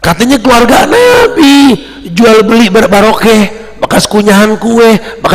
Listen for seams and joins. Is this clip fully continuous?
yes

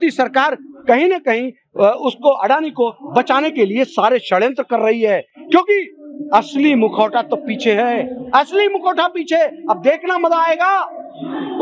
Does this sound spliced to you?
no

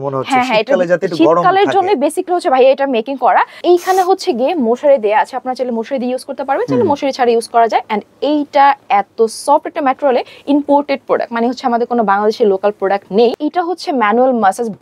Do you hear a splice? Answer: yes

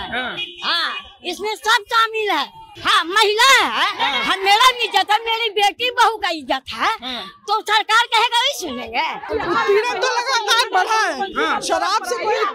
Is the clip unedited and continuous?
no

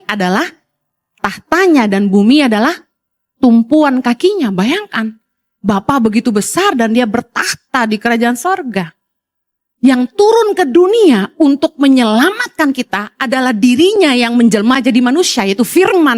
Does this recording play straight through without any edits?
yes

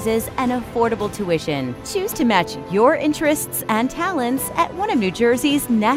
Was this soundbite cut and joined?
no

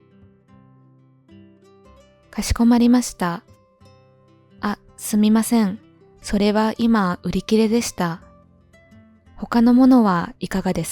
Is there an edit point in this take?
yes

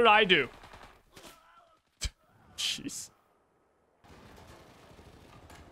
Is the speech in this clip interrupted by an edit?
yes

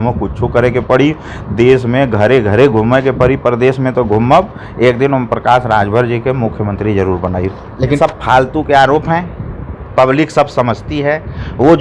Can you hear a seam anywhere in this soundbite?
yes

